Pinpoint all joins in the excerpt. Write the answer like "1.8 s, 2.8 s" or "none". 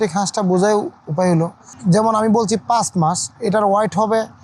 1.7 s